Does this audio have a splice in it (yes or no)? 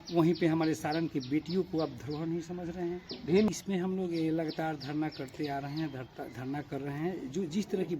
yes